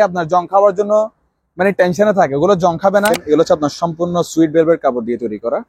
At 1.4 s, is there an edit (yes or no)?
no